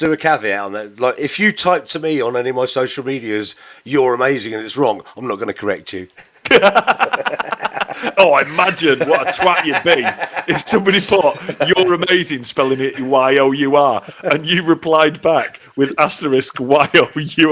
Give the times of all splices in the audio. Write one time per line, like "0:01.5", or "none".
none

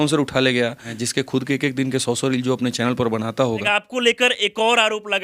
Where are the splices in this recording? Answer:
0:00.9
0:03.7

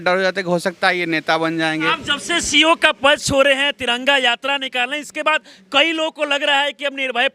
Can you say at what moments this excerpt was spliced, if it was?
0:02.0

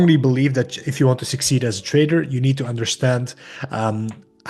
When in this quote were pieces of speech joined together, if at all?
none

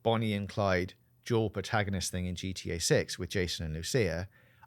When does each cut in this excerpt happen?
none

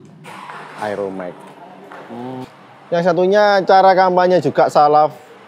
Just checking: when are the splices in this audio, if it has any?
0:02.4

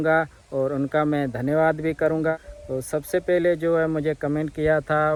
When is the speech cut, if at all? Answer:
none

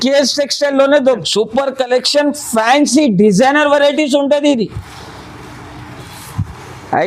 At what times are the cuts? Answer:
0:01.2

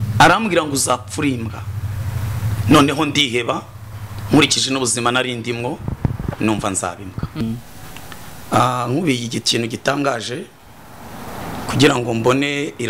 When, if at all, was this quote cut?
0:07.4

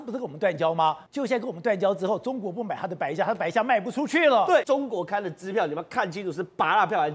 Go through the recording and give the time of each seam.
0:01.0
0:04.6

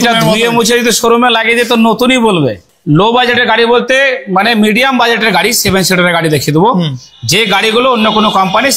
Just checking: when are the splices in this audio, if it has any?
0:02.7

